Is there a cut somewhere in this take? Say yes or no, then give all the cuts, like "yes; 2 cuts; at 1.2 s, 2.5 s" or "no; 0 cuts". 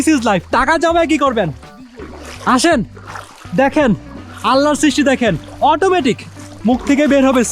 no; 0 cuts